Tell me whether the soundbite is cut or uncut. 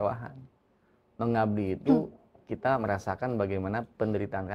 uncut